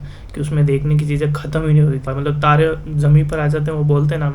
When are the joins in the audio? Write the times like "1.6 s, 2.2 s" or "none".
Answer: 2.1 s